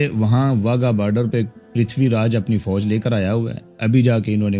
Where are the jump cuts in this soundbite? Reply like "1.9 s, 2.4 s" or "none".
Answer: none